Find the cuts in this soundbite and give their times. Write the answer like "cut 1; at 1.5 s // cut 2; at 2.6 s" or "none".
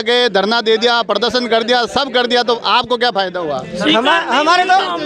none